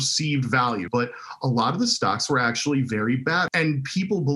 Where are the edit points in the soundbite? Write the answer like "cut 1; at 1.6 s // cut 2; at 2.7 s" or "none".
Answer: cut 1; at 0.9 s // cut 2; at 3.5 s